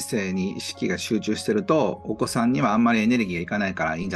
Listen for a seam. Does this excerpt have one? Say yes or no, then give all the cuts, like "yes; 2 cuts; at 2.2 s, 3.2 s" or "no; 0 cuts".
no; 0 cuts